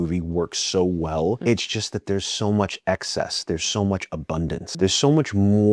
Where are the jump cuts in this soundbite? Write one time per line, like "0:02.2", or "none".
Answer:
0:01.4
0:04.7

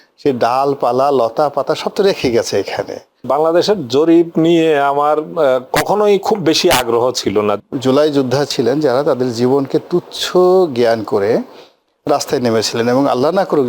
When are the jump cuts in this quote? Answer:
0:03.3
0:07.6

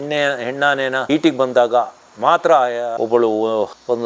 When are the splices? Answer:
0:03.0

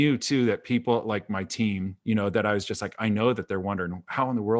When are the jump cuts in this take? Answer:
0:01.9

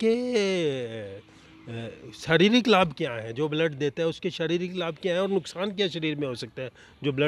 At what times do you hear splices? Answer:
none

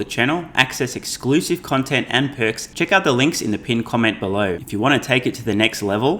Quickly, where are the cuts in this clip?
0:02.6
0:04.6

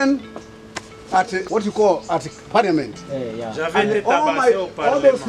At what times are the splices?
0:01.5

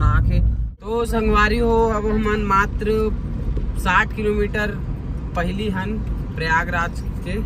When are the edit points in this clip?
0:00.9

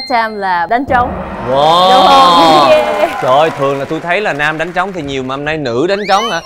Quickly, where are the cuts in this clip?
none

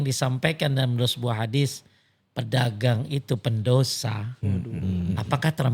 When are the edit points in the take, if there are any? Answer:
none

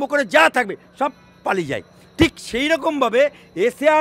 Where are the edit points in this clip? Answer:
none

